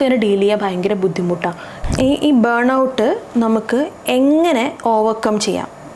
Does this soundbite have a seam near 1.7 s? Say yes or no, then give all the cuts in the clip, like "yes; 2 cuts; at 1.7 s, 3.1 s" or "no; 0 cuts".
yes; 1 cut; at 1.7 s